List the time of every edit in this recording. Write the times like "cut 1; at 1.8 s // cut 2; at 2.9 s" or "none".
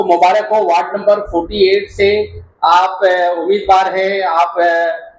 none